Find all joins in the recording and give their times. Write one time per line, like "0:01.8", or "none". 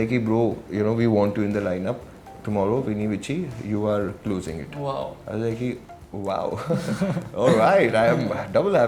none